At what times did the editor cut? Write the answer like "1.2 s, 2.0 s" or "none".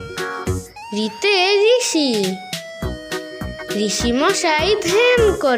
none

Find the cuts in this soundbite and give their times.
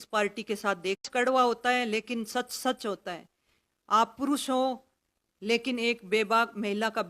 1.0 s

